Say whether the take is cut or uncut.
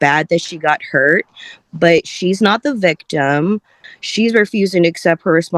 cut